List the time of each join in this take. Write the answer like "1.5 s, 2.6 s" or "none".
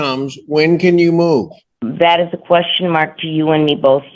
2.1 s